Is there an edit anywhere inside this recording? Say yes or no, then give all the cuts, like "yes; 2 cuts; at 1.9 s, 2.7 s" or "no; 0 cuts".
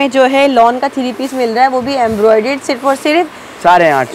no; 0 cuts